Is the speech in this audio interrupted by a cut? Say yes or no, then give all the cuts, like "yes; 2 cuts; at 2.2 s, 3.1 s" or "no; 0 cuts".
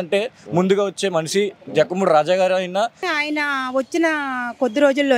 yes; 1 cut; at 3.0 s